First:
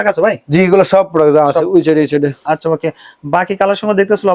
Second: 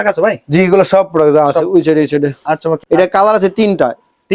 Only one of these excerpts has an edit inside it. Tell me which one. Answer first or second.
second